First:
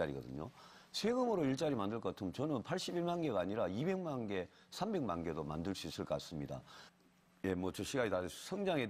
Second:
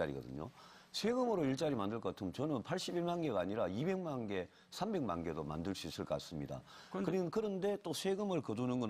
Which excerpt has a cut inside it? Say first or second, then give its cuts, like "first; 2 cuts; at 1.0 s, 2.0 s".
second; 1 cut; at 6.9 s